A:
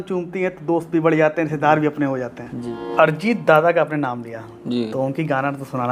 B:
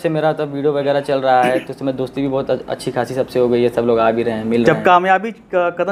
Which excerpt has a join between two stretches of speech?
A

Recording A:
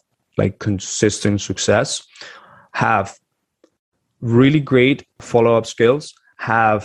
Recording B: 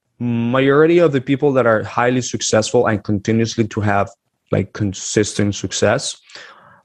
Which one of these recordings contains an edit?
A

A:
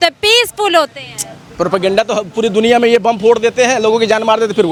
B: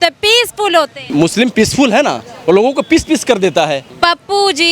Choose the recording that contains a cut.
B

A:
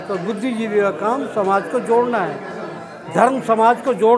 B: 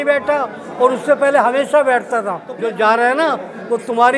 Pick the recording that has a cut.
B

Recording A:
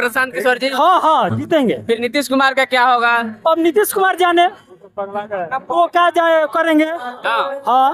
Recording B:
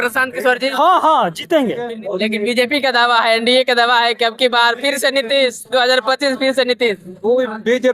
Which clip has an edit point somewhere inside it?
B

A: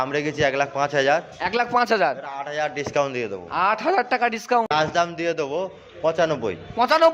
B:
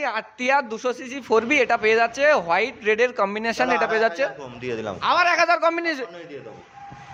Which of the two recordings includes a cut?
A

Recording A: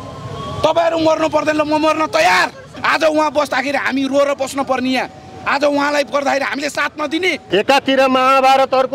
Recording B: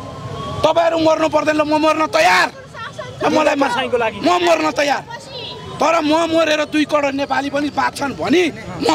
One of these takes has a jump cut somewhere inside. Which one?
A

